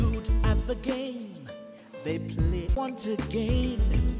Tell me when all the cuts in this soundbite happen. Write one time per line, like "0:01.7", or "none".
0:02.7